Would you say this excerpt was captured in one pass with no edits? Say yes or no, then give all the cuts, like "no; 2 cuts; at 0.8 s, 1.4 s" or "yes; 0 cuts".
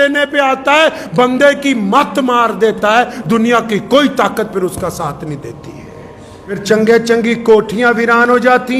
no; 1 cut; at 6.6 s